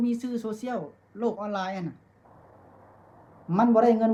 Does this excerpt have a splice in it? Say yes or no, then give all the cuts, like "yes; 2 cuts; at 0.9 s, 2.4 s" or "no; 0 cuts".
no; 0 cuts